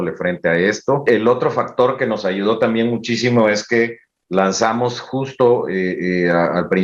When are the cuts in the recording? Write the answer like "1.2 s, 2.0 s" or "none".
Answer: 1.0 s